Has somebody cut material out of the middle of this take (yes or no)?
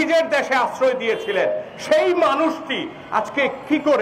no